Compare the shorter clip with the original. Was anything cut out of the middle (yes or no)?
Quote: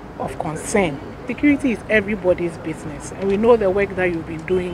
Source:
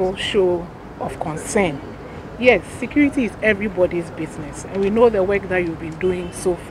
yes